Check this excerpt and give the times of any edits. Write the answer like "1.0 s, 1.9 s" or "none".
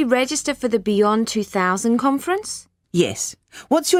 none